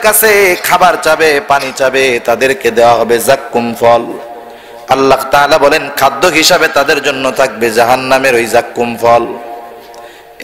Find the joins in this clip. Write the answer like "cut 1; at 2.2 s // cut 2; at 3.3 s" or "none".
none